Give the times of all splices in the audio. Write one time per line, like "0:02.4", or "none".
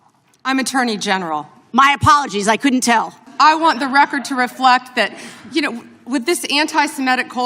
0:03.2